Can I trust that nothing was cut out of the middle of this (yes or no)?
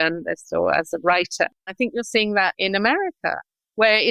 no